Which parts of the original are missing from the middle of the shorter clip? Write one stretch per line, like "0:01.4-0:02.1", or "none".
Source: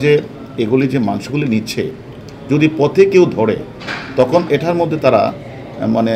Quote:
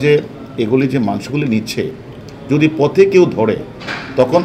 none